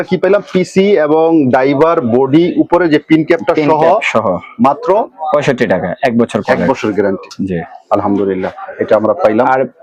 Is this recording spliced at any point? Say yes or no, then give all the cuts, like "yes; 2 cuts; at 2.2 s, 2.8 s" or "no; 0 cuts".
no; 0 cuts